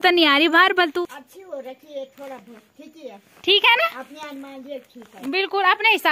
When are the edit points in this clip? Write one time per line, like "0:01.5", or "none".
0:00.9

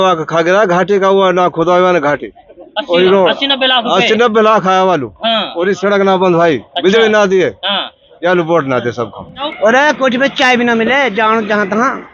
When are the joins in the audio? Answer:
0:09.5

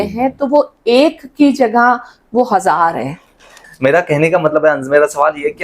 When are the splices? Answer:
0:03.7

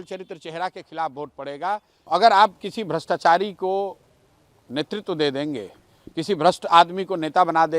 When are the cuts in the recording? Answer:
0:02.0

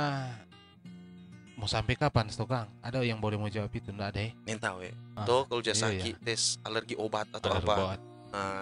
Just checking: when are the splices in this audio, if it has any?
0:05.1

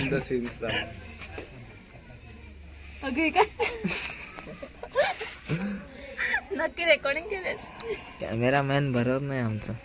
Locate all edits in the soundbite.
none

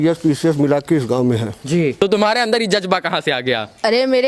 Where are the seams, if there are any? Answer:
0:01.9

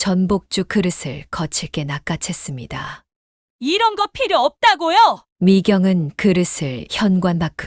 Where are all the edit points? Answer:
none

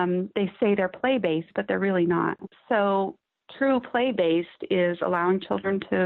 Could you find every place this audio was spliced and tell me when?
0:01.5
0:02.5

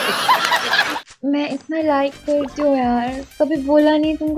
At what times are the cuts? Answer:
0:00.9

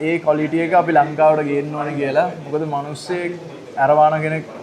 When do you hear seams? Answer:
none

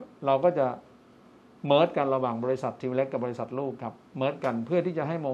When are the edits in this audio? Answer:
none

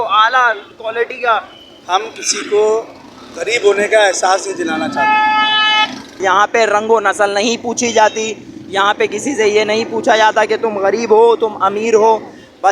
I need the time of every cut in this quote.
0:06.2

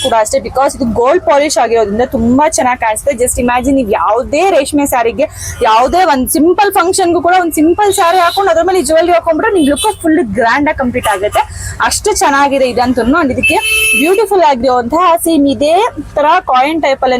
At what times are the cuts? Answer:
none

